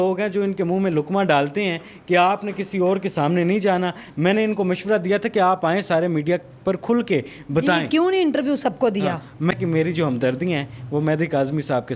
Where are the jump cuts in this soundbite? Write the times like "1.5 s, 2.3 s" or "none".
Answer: 9.5 s

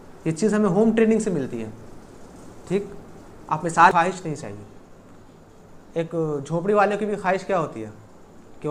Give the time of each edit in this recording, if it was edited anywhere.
3.9 s

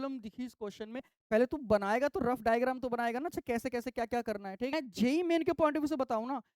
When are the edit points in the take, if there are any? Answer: 1.1 s, 4.7 s

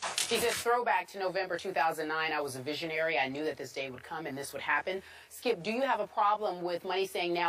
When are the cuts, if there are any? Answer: none

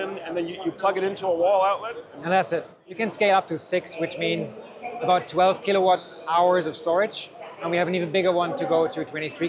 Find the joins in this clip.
2.8 s

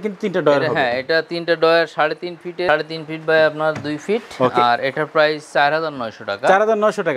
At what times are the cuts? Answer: none

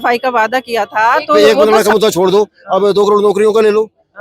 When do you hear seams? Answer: 1.4 s

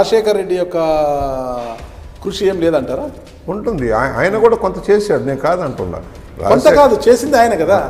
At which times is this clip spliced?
none

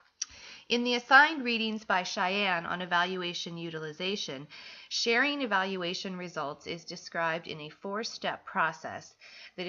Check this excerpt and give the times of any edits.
6.0 s

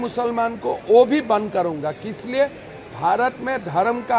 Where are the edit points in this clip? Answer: none

